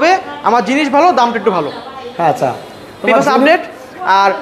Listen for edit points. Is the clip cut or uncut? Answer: uncut